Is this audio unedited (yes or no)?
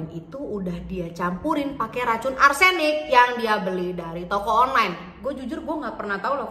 yes